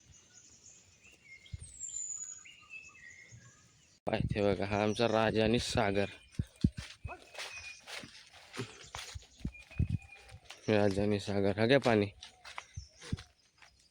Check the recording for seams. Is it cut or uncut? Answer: cut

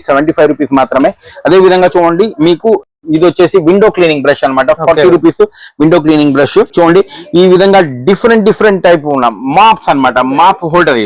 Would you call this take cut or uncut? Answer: uncut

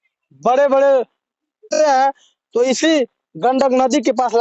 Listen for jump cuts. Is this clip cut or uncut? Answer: cut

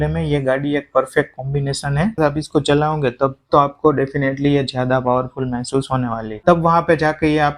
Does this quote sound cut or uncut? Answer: cut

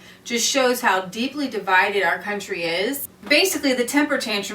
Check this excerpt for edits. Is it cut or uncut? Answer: cut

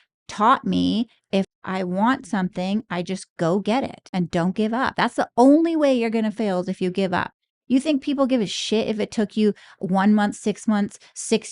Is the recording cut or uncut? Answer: cut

